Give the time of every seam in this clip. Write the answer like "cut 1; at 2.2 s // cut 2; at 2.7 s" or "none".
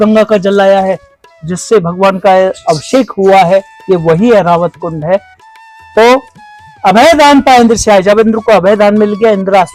none